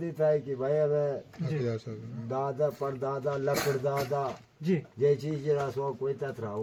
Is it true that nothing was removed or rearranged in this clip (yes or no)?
yes